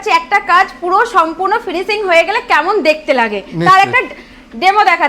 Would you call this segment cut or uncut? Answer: uncut